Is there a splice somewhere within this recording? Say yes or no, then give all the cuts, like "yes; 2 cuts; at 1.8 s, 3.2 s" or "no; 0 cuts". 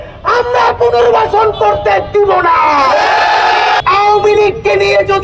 yes; 1 cut; at 3.8 s